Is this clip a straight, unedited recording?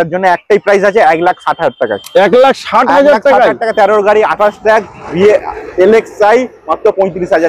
yes; 0 cuts

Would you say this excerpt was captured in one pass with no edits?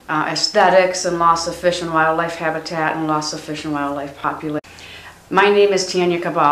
yes; 0 cuts

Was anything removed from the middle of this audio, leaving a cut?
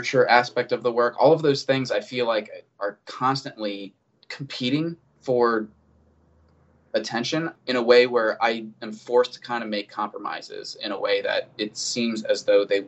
yes; 1 cut; at 7.6 s

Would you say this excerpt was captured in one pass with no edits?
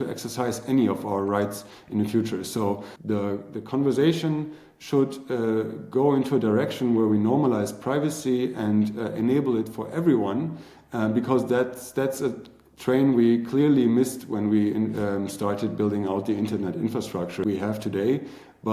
no; 2 cuts; at 2.9 s, 17.4 s

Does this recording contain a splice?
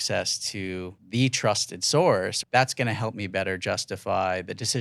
yes; 2 cuts; at 1.0 s, 2.4 s

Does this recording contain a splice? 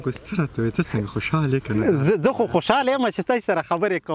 no; 0 cuts

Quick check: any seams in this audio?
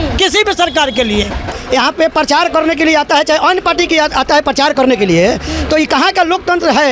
yes; 1 cut; at 1.5 s

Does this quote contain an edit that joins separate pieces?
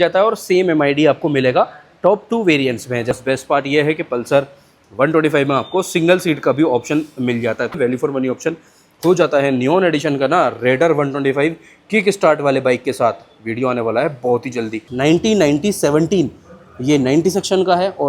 yes; 3 cuts; at 3.1 s, 7.8 s, 14.8 s

